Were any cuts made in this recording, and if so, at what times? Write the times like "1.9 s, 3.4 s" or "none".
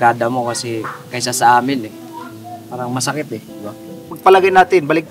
4.1 s